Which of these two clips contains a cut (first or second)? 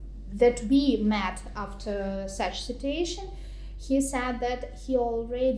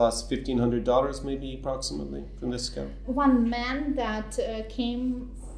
second